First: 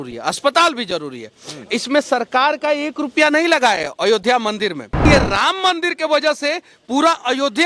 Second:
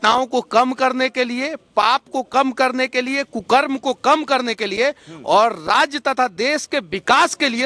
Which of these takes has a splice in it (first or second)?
first